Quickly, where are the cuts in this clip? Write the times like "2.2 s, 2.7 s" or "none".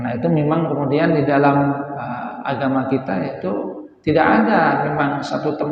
none